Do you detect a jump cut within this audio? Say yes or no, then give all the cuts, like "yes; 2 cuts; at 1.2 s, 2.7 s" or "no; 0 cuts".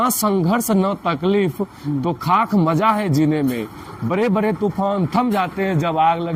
no; 0 cuts